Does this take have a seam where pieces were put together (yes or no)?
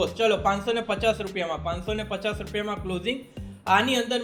no